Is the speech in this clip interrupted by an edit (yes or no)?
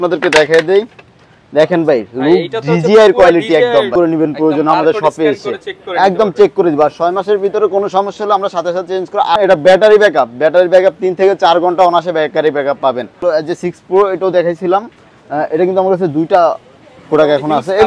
yes